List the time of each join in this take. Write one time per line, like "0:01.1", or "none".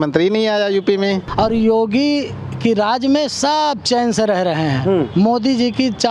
0:01.3